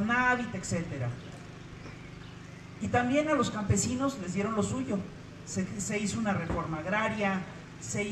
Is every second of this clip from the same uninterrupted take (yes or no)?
yes